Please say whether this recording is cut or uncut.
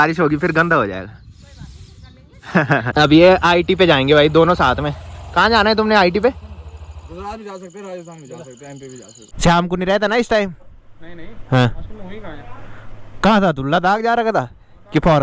cut